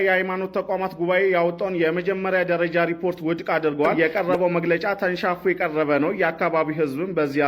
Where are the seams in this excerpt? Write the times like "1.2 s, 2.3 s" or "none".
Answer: 3.9 s